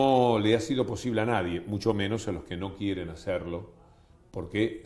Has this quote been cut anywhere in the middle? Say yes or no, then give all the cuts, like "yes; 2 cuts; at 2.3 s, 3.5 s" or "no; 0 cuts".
no; 0 cuts